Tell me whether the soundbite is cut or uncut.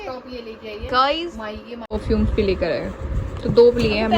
cut